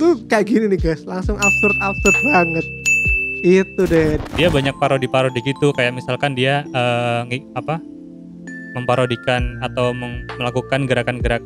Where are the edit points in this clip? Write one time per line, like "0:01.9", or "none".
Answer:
0:04.2